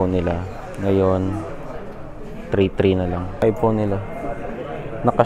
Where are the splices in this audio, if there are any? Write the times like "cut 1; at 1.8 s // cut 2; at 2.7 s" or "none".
cut 1; at 3.4 s

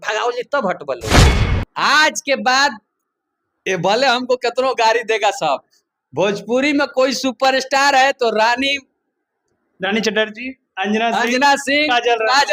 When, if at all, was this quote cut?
cut 1; at 1.0 s // cut 2; at 1.5 s

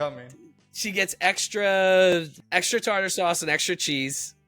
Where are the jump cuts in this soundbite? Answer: cut 1; at 2.3 s

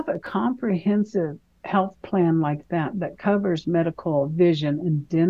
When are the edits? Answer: none

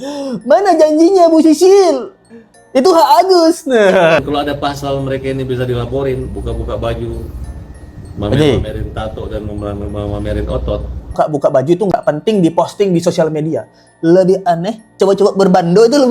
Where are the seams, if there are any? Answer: cut 1; at 4.2 s // cut 2; at 11.1 s

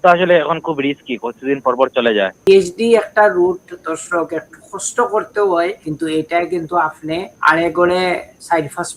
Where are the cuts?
cut 1; at 2.5 s // cut 2; at 5.8 s // cut 3; at 7.3 s

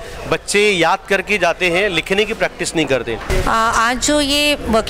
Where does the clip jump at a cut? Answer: cut 1; at 3.3 s

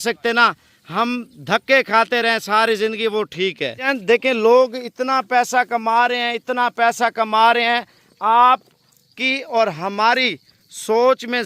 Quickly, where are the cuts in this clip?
cut 1; at 3.9 s

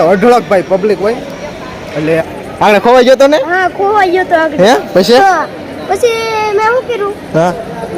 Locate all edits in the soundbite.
cut 1; at 2.1 s

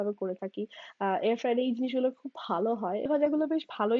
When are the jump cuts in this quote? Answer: cut 1; at 3.1 s

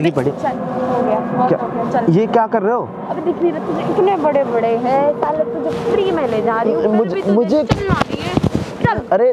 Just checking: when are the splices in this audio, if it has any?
none

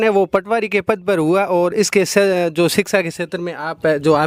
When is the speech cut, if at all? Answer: none

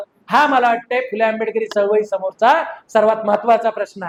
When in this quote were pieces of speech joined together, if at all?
none

